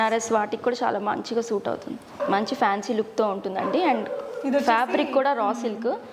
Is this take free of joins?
no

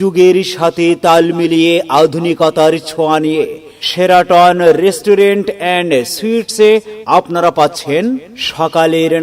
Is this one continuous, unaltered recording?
yes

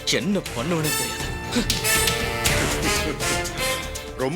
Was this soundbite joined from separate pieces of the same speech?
no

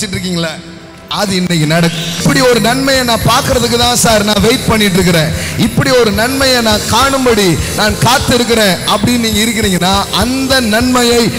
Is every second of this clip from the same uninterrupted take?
no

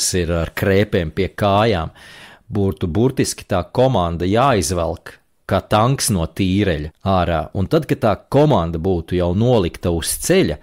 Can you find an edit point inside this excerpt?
yes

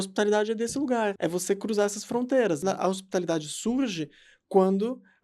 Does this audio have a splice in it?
yes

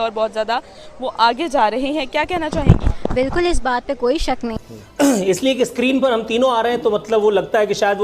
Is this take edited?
yes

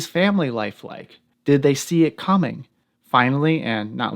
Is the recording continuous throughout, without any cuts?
yes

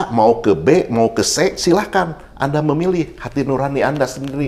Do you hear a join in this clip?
no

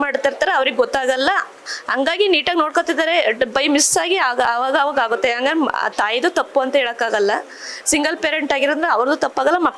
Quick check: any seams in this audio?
no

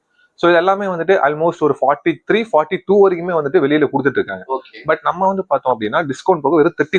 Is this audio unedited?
yes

